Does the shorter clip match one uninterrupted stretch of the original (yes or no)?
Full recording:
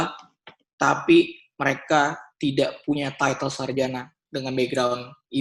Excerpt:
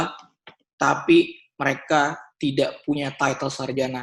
yes